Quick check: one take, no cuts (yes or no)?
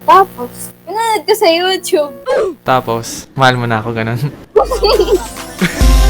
yes